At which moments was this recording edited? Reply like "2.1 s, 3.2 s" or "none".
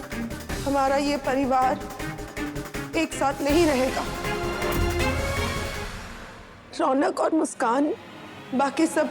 5.7 s